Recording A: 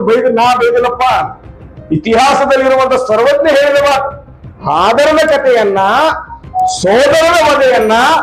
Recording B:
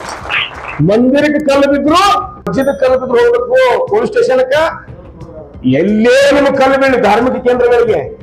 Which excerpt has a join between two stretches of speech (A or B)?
B